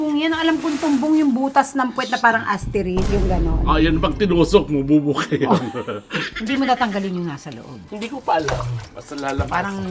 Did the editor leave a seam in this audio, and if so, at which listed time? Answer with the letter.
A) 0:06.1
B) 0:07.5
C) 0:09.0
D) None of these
A